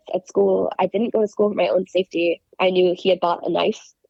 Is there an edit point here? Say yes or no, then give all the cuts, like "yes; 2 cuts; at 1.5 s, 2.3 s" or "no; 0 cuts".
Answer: no; 0 cuts